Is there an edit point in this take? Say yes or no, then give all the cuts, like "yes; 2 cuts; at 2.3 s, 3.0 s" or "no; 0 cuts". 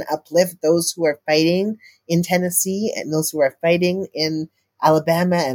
no; 0 cuts